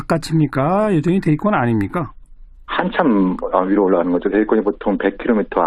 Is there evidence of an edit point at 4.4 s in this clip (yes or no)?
no